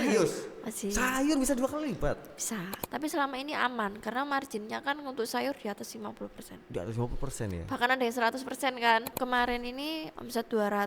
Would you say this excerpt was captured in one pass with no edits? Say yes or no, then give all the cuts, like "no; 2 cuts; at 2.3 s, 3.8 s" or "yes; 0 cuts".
no; 2 cuts; at 2.7 s, 9.1 s